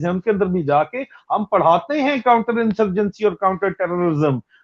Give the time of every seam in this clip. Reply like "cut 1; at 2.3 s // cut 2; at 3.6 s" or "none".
none